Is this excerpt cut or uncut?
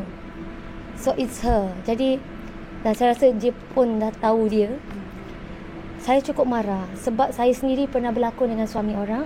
uncut